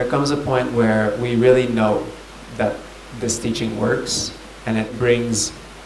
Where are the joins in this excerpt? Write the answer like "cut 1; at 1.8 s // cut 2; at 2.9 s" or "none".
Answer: cut 1; at 4.9 s